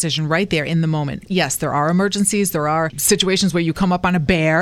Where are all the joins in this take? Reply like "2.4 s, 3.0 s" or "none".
1.2 s, 3.0 s